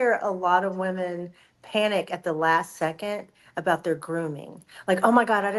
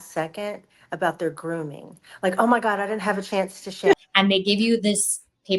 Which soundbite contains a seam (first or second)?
second